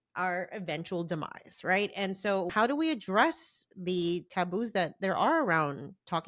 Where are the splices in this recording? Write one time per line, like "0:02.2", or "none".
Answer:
0:02.5